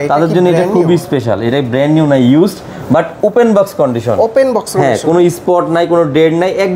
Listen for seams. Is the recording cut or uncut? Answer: uncut